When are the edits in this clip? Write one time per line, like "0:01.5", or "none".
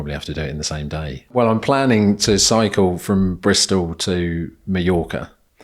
0:01.3